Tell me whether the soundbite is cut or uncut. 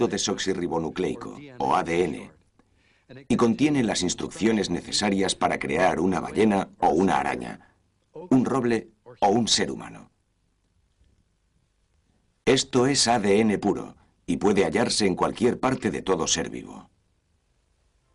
uncut